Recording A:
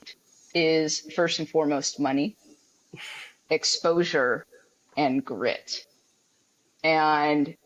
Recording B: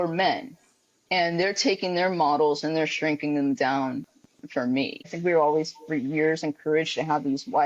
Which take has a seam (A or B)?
B